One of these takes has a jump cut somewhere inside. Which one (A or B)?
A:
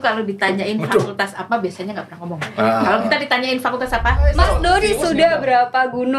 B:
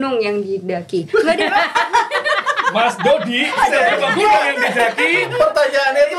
A